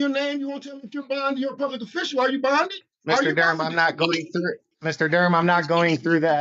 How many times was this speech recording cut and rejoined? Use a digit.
2